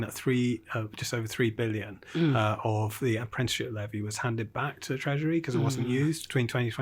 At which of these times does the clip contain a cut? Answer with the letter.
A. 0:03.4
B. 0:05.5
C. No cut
C